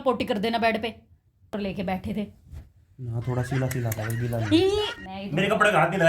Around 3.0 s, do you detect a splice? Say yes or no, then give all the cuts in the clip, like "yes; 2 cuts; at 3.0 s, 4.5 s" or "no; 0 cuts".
no; 2 cuts; at 1.5 s, 5.0 s